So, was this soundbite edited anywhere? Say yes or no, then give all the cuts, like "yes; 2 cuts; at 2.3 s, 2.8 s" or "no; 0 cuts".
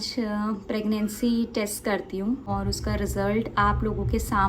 yes; 1 cut; at 2.5 s